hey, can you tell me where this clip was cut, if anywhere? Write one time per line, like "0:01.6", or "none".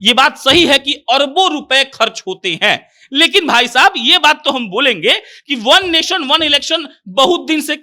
none